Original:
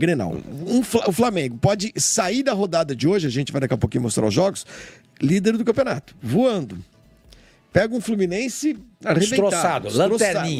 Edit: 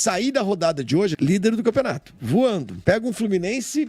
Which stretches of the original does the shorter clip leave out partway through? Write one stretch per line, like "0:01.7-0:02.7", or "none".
0:03.3-0:05.2
0:06.7-0:07.6